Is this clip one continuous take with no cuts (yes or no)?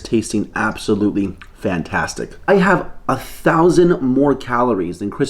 no